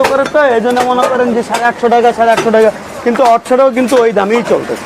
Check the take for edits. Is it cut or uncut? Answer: uncut